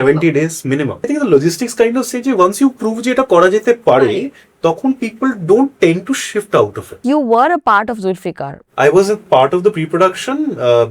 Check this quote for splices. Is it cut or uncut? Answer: cut